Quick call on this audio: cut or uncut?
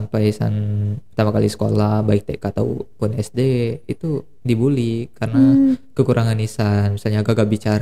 uncut